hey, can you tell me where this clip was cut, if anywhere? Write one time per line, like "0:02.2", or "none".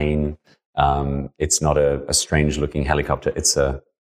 none